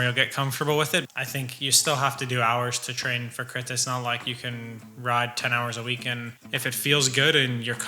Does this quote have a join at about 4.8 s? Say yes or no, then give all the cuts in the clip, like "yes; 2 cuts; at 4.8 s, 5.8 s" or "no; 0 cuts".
no; 2 cuts; at 1.1 s, 6.3 s